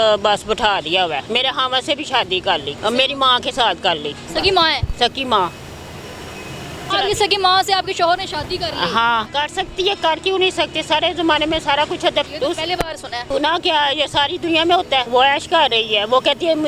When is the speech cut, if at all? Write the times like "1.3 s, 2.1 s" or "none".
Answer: 1.2 s, 2.7 s, 4.3 s, 6.9 s, 9.3 s, 12.3 s, 13.2 s, 15.1 s